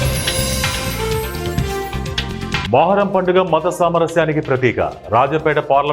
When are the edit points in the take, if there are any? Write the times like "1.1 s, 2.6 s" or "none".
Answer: 2.6 s